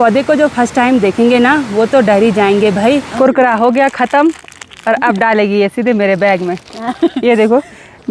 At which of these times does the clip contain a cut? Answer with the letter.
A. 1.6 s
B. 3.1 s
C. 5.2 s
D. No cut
B